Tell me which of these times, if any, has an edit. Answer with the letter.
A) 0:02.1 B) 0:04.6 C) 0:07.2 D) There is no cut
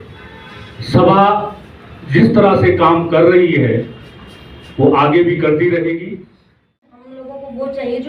C